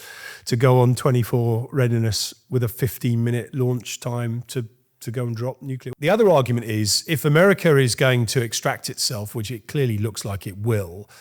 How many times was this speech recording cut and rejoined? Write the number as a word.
one